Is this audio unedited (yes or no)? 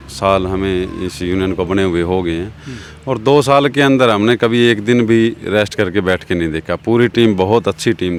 yes